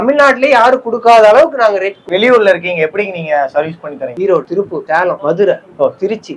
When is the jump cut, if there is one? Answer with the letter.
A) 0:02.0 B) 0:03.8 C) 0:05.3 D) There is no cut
A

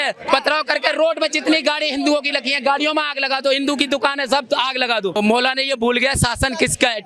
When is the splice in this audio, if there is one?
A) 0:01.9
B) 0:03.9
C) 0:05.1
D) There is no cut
C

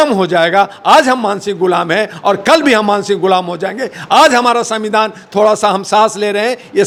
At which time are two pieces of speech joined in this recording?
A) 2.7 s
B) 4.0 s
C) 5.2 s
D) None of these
D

